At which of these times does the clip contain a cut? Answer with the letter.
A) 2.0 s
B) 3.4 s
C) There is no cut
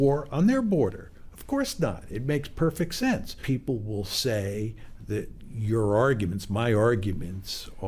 B